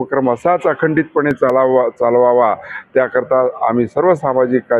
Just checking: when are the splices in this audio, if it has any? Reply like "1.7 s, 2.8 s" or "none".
none